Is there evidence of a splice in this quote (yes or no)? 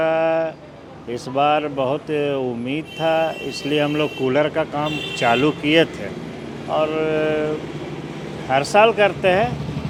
no